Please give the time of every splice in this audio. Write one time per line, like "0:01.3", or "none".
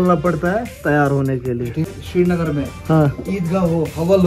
0:02.0